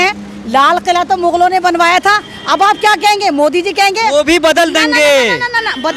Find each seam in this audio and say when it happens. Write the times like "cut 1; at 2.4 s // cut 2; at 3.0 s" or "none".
none